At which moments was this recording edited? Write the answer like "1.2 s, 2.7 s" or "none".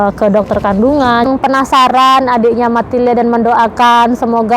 1.2 s